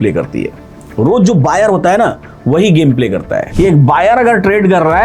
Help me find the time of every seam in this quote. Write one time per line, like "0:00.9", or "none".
0:03.4